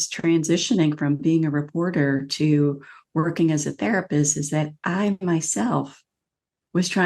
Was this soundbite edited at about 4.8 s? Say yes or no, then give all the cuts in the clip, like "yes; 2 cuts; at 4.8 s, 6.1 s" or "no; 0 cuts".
no; 0 cuts